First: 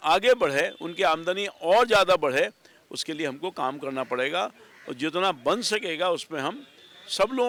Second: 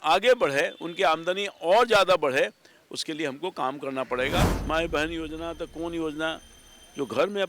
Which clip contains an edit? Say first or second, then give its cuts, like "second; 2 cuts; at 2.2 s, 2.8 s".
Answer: second; 1 cut; at 4.4 s